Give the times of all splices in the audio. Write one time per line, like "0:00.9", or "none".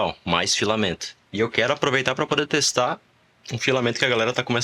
0:01.2